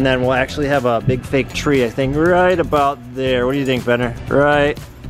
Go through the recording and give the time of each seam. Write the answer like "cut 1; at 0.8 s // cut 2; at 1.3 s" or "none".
none